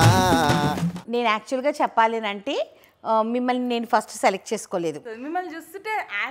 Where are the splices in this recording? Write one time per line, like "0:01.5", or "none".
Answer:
0:00.9
0:05.1